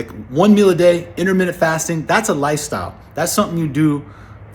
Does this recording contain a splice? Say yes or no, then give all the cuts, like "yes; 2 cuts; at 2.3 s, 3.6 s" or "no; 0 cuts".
no; 0 cuts